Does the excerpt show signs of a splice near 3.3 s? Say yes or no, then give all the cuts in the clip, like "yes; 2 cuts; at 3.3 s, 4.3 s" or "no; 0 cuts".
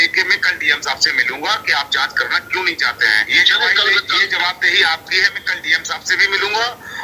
yes; 1 cut; at 3.3 s